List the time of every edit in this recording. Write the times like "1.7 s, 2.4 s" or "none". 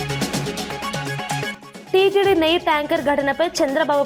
1.6 s